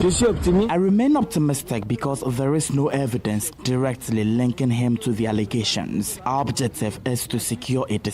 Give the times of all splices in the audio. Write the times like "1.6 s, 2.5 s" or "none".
6.1 s